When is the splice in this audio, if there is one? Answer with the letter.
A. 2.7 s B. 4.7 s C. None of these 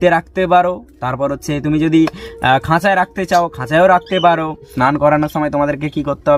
B